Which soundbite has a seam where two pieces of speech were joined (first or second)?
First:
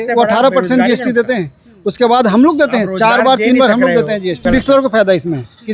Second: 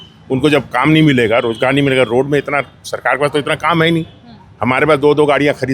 first